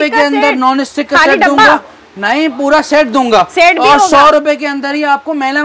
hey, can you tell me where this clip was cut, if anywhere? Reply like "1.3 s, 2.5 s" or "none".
none